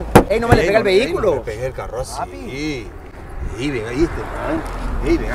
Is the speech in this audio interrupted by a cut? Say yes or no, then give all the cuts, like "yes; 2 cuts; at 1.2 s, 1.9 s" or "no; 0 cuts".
no; 0 cuts